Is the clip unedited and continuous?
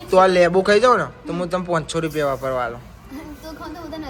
yes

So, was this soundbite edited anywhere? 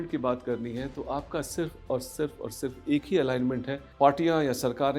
yes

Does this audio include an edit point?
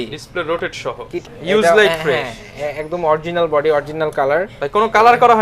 yes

